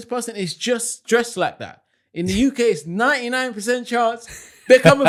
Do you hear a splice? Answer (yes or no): no